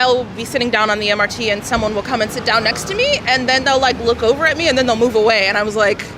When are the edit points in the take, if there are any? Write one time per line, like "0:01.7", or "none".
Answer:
none